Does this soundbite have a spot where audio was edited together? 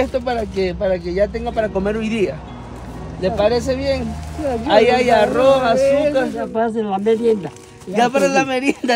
yes; 1 cut; at 6.4 s

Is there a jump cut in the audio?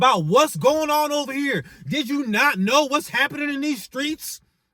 no; 0 cuts

